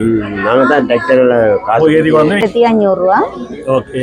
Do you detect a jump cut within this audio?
yes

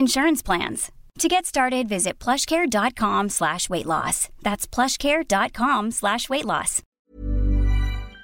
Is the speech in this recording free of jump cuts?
no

